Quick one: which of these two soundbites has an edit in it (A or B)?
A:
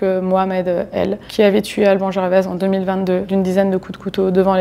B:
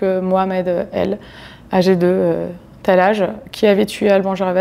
A